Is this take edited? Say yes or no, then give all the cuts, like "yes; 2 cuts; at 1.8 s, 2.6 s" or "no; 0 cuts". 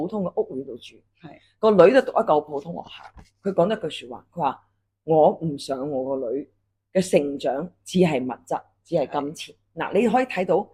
no; 0 cuts